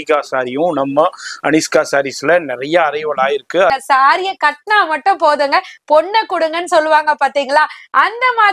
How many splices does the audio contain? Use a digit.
1